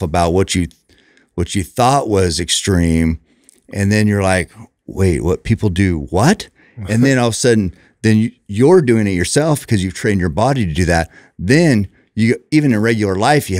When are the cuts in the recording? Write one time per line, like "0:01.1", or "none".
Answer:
none